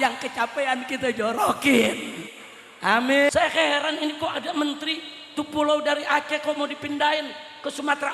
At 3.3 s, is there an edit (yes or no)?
yes